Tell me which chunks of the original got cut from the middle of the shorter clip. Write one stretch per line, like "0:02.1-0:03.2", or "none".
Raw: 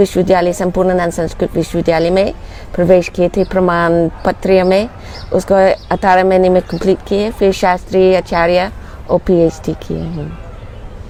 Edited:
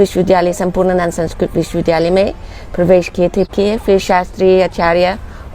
0:03.5-0:07.0